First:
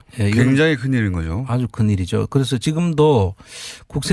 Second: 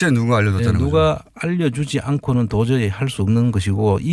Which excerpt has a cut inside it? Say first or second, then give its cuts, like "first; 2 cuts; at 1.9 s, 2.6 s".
first; 1 cut; at 1.9 s